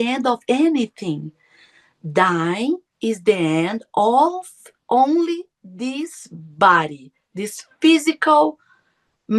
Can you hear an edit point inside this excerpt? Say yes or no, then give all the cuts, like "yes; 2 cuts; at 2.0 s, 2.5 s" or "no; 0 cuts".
no; 0 cuts